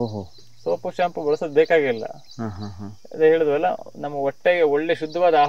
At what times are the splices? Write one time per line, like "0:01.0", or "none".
none